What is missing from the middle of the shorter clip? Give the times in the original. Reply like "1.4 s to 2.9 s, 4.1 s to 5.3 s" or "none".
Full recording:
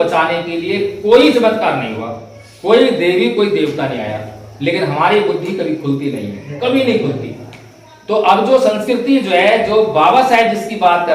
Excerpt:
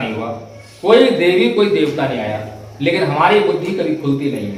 none